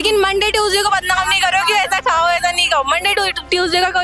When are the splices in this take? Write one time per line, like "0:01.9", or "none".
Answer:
none